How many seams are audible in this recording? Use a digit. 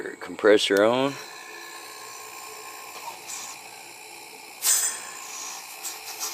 1